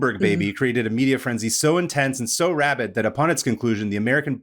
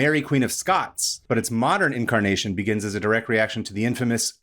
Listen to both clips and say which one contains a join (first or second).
second